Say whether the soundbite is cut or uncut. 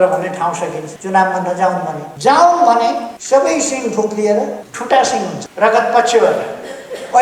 cut